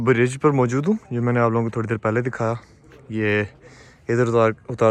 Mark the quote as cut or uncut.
uncut